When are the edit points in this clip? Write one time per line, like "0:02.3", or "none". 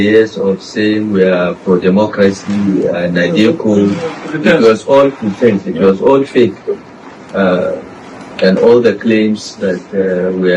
none